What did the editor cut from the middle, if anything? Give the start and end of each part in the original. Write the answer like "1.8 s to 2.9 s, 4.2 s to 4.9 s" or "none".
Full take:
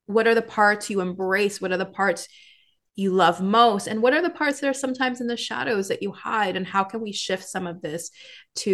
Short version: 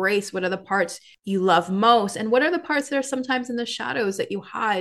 2.4 s to 2.8 s